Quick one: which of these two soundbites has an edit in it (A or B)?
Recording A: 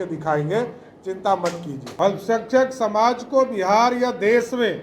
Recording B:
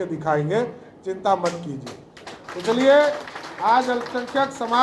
A